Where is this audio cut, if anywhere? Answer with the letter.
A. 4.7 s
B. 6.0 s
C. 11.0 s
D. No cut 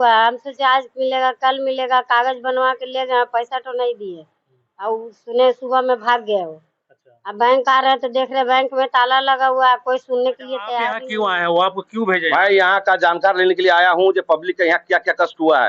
C